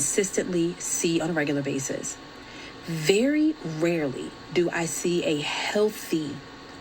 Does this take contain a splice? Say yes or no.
yes